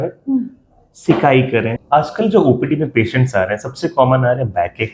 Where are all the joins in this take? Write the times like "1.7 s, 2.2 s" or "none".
1.8 s